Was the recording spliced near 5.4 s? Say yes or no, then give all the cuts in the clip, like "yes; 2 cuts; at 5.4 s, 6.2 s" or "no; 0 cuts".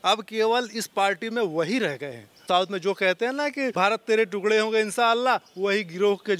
no; 2 cuts; at 2.4 s, 3.7 s